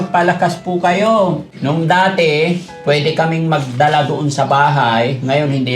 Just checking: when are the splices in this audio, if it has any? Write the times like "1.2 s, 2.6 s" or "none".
1.5 s